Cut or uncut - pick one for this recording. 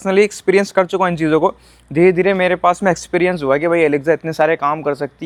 uncut